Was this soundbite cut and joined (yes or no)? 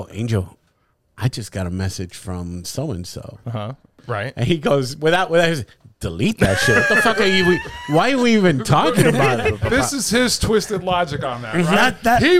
yes